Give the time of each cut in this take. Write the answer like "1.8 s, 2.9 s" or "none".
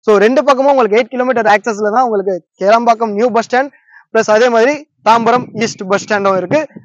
none